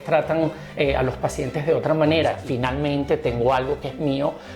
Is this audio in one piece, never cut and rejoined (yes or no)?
no